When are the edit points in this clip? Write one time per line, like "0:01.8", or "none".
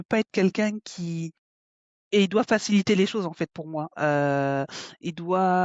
none